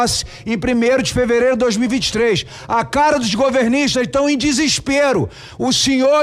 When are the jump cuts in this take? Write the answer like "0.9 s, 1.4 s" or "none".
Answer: none